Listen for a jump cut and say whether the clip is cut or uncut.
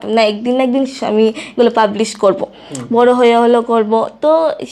uncut